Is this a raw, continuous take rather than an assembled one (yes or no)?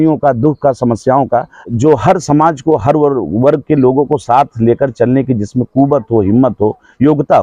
no